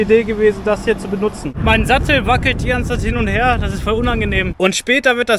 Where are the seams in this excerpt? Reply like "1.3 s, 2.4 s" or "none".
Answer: 1.5 s, 4.5 s